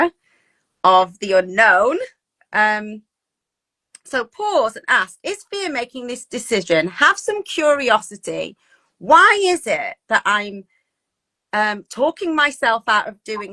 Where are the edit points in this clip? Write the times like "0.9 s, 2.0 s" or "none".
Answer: none